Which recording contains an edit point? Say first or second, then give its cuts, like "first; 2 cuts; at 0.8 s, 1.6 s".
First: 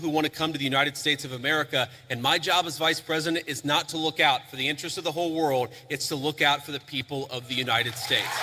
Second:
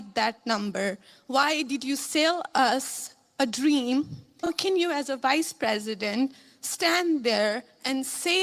second; 1 cut; at 4.5 s